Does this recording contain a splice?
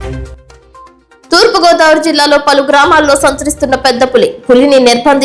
yes; 1 cut; at 1.1 s

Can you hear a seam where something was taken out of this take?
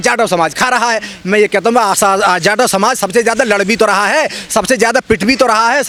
no; 0 cuts

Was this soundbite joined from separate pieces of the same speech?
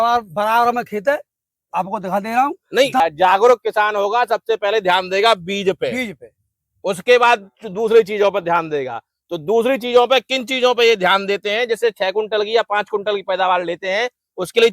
yes; 1 cut; at 3.0 s

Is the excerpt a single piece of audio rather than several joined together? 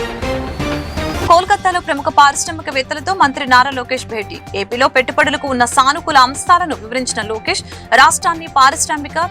no; 1 cut; at 1.1 s

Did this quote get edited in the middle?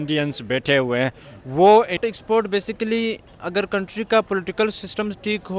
yes; 1 cut; at 2.0 s

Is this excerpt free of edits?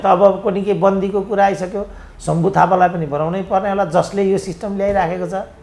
yes; 0 cuts

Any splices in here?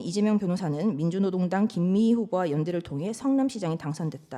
no; 0 cuts

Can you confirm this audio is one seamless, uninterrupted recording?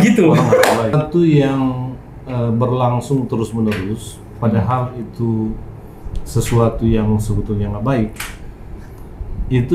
no; 1 cut; at 0.9 s

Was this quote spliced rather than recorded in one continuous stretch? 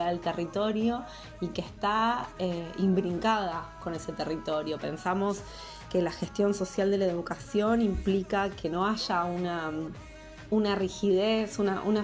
no; 0 cuts

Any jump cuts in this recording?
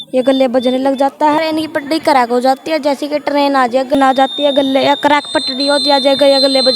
yes; 2 cuts; at 1.4 s, 3.9 s

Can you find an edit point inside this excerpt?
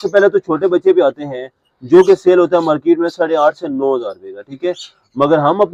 no; 0 cuts

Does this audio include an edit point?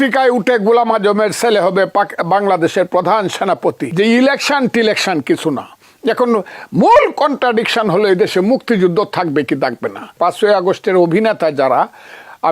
yes; 2 cuts; at 3.8 s, 10.2 s

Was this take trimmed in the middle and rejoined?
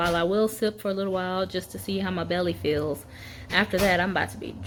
no; 0 cuts

